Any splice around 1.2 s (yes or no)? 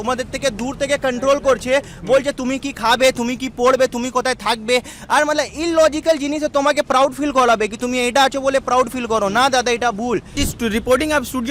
no